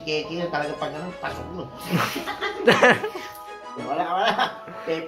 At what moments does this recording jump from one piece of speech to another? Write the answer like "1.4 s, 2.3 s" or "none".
3.8 s